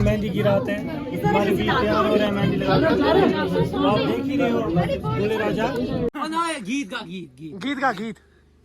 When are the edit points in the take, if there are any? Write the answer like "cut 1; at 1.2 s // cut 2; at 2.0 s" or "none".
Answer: cut 1; at 6.1 s